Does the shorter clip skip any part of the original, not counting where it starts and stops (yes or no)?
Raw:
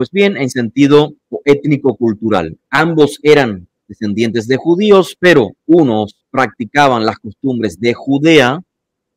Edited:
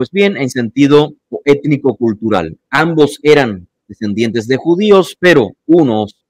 no